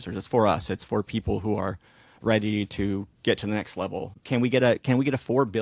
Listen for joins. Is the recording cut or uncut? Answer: cut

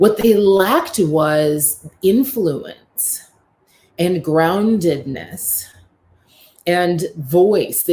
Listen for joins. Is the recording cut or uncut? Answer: uncut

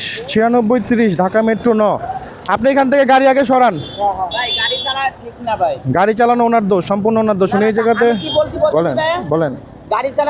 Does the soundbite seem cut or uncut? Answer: uncut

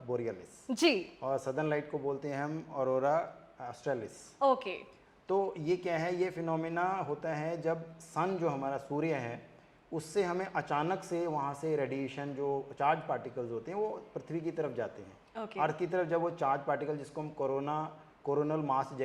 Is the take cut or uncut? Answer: uncut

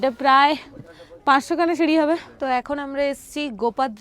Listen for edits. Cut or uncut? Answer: cut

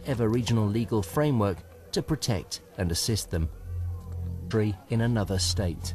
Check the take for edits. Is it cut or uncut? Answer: uncut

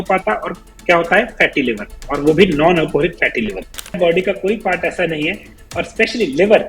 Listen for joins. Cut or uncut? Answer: cut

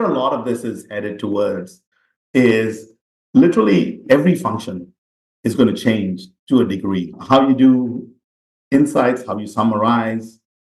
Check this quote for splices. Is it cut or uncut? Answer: uncut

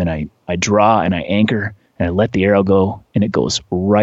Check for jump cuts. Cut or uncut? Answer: uncut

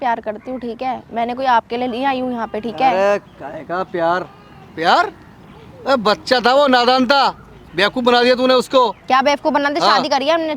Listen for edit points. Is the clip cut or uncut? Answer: uncut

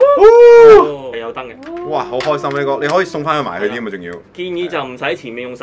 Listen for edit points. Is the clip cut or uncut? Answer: cut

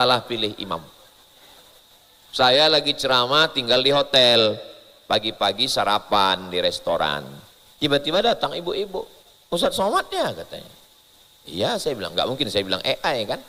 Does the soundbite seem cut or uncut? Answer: uncut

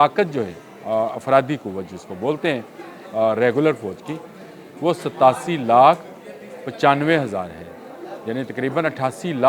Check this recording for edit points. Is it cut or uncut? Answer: uncut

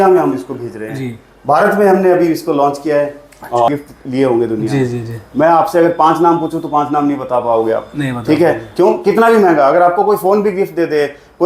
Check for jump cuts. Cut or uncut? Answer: cut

